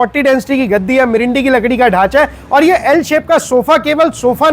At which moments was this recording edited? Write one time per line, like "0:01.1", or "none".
none